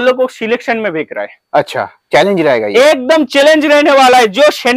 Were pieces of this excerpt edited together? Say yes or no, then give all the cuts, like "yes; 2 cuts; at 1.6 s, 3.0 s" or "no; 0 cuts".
no; 0 cuts